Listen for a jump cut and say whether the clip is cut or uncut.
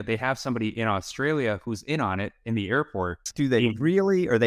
cut